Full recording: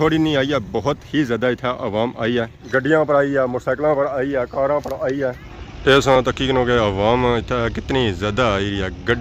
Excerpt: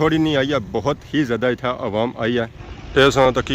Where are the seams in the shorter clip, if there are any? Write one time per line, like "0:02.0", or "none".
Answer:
0:02.6